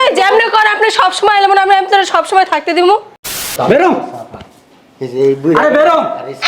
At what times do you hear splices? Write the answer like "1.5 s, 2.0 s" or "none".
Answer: 3.5 s